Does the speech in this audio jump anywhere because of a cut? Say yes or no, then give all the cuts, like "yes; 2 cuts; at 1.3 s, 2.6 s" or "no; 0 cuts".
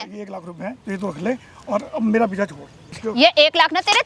yes; 1 cut; at 3.0 s